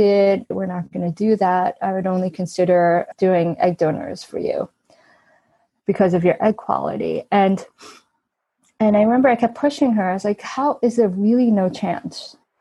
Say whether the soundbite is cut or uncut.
uncut